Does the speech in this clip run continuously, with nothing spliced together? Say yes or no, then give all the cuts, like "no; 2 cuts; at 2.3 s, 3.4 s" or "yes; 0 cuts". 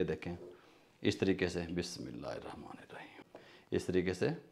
no; 1 cut; at 3.2 s